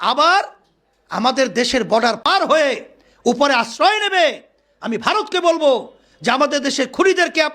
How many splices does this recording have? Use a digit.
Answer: 1